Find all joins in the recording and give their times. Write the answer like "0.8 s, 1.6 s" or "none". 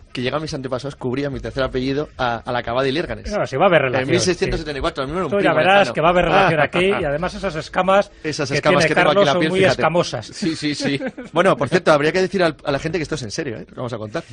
1.5 s